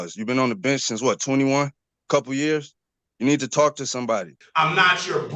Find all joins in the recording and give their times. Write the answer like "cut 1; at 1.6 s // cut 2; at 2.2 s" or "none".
cut 1; at 4.4 s